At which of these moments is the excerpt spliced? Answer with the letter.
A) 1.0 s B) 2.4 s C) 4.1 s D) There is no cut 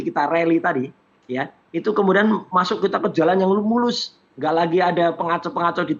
D